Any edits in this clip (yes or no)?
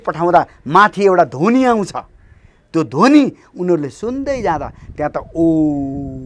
no